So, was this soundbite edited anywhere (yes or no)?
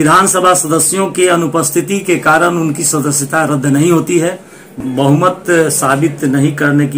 yes